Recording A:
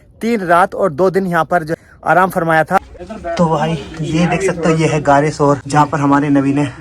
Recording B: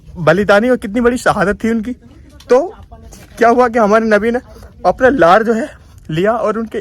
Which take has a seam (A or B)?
A